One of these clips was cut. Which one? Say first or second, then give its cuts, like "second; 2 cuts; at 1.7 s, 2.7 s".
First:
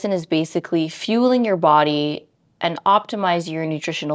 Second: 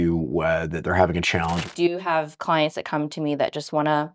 second; 1 cut; at 1.7 s